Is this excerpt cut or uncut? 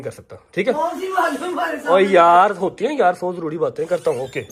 uncut